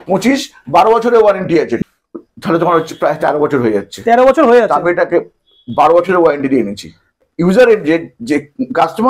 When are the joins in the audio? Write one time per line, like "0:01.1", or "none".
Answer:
0:01.7
0:07.2